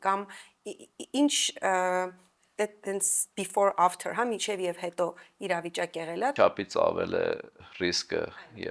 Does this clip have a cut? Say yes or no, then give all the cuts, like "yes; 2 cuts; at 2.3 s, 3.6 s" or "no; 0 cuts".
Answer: yes; 2 cuts; at 6.3 s, 7.6 s